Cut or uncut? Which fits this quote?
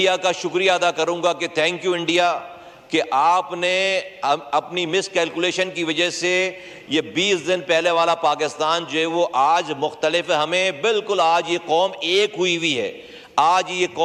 uncut